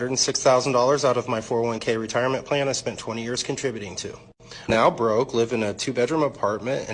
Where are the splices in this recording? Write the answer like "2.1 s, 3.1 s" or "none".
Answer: 4.7 s